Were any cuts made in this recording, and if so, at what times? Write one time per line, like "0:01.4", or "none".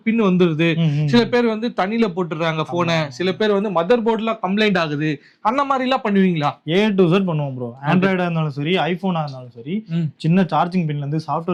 none